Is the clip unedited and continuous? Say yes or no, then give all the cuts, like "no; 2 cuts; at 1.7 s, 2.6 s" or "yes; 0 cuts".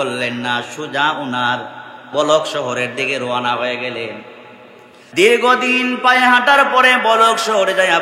no; 2 cuts; at 2.1 s, 5.0 s